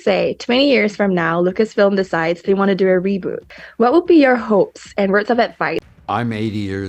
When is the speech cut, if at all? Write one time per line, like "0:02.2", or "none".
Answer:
0:03.4
0:05.9